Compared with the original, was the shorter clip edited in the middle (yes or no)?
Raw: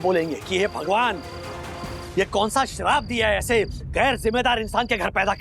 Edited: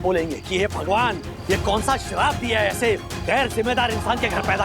yes